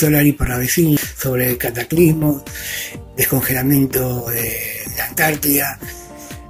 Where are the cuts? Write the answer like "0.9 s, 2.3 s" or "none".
1.1 s